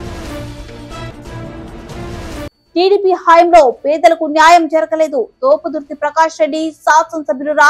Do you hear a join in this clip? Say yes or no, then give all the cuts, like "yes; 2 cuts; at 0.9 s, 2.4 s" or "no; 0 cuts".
yes; 2 cuts; at 0.9 s, 2.5 s